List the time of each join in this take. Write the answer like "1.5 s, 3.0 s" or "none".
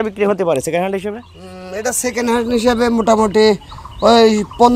none